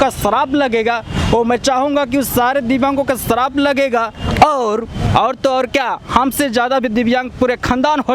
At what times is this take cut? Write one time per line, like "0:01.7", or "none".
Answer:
none